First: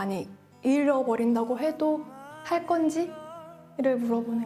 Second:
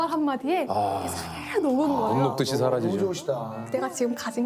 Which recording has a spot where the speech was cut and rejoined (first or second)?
second